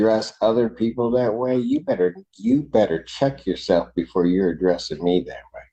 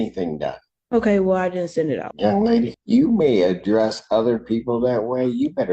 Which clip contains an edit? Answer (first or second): second